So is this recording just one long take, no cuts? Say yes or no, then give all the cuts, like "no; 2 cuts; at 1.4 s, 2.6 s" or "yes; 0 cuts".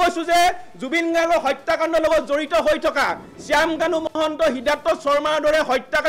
yes; 0 cuts